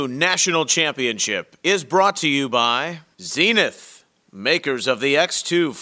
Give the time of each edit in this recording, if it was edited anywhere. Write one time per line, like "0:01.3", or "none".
0:03.0